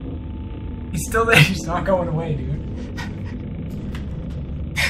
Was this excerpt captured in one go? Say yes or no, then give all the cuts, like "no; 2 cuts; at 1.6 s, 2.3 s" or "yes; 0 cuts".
yes; 0 cuts